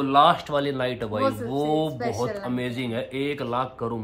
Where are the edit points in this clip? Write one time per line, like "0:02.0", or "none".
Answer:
none